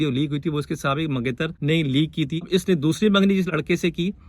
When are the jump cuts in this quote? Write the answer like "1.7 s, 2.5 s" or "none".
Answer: 1.6 s, 2.5 s